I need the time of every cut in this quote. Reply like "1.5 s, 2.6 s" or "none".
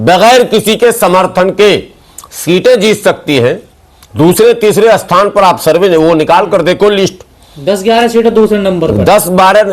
none